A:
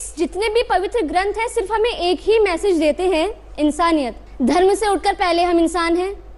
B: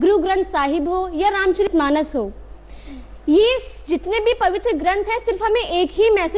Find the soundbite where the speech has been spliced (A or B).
A